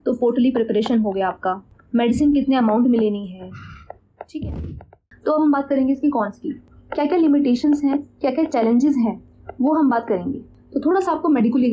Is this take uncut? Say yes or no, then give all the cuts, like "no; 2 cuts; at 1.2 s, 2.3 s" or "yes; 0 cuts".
no; 2 cuts; at 5.1 s, 10.6 s